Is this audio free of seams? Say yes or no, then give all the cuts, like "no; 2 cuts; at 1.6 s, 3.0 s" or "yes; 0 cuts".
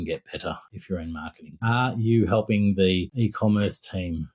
no; 2 cuts; at 0.9 s, 3.1 s